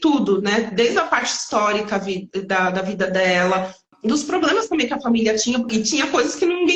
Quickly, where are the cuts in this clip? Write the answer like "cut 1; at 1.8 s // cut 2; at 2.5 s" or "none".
cut 1; at 3.9 s // cut 2; at 5.7 s